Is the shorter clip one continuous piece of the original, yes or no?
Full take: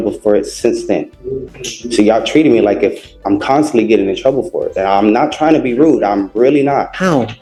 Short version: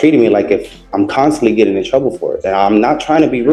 yes